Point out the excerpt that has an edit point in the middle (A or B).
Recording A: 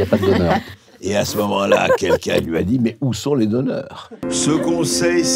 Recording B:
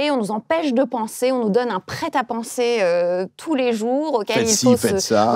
A